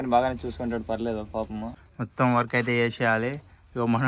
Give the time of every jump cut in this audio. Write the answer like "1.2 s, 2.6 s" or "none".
1.7 s